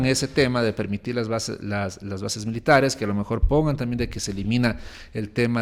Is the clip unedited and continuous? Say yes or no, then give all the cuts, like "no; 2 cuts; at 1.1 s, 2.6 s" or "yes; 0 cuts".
yes; 0 cuts